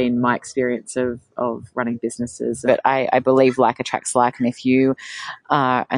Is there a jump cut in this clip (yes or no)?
yes